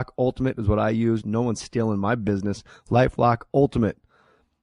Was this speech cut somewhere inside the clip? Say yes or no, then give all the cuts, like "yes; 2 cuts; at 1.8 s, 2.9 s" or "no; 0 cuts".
no; 0 cuts